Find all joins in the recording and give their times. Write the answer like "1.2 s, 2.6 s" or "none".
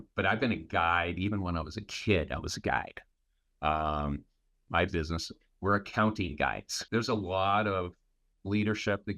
4.6 s, 6.7 s